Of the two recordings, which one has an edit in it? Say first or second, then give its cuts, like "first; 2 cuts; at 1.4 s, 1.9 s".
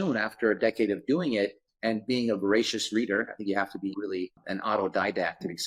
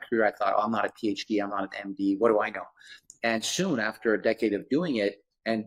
first; 1 cut; at 4.4 s